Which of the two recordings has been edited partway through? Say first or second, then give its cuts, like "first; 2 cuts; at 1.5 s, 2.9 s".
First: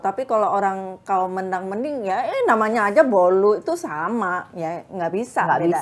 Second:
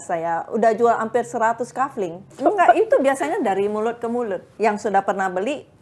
second; 2 cuts; at 2.4 s, 4.5 s